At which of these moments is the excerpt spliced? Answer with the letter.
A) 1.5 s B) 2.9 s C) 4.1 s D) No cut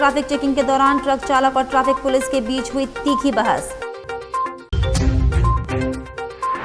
D